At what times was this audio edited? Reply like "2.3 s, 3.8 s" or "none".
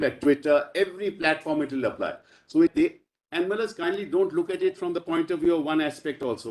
2.7 s